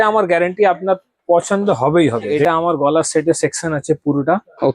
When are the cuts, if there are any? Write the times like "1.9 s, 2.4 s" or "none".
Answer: 2.4 s